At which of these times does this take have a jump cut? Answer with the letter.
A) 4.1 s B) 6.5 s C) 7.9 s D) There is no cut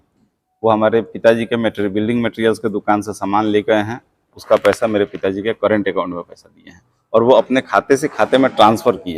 D